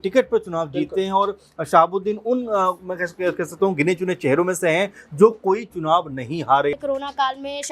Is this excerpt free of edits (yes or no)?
no